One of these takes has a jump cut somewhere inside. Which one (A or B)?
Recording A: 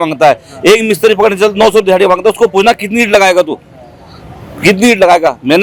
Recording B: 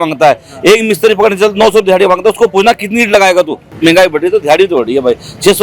B